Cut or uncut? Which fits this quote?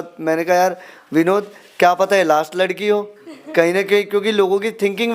uncut